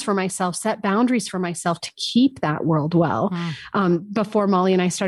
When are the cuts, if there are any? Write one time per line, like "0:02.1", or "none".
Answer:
none